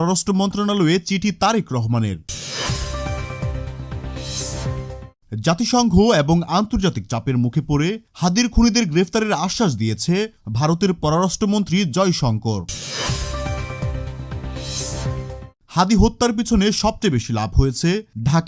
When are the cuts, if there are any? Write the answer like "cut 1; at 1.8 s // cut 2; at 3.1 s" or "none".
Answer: cut 1; at 2.4 s // cut 2; at 5.1 s // cut 3; at 12.8 s // cut 4; at 15.6 s